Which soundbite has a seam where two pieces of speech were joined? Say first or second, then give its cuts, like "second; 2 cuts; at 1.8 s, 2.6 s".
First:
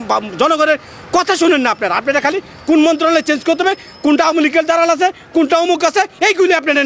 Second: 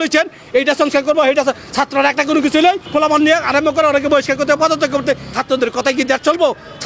second; 2 cuts; at 2.8 s, 5.3 s